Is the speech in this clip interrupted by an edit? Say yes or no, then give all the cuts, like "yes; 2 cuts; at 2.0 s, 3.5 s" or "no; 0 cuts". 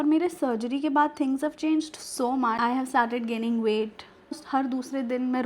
yes; 2 cuts; at 2.6 s, 4.4 s